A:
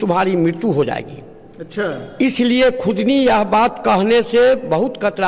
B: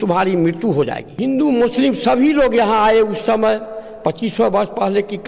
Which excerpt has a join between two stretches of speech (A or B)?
B